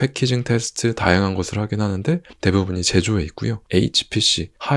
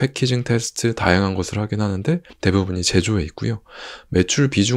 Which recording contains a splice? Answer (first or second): first